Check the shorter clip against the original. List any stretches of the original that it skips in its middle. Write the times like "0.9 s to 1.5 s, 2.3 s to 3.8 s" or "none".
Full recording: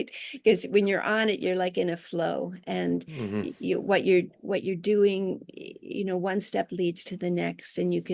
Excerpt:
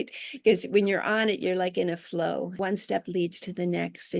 2.6 s to 6.2 s